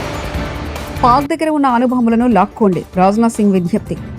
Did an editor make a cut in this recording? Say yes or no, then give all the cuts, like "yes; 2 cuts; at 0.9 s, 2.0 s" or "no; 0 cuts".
yes; 1 cut; at 0.9 s